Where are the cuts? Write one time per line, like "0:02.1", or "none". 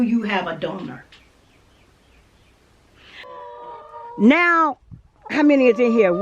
0:03.3